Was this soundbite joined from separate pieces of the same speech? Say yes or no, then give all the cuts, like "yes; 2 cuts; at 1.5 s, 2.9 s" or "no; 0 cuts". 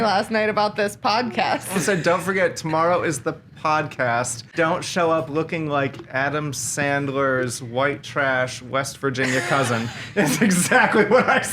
yes; 2 cuts; at 1.8 s, 4.4 s